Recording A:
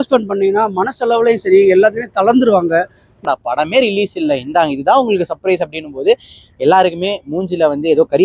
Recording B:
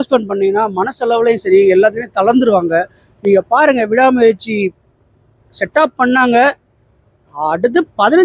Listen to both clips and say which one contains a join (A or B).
A